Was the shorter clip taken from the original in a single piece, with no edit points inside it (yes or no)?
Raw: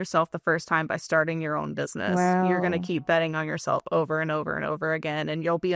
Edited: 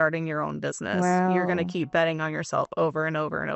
yes